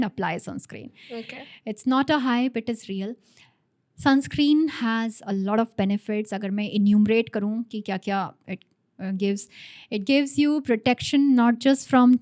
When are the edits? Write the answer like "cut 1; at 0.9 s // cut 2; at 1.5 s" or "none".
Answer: none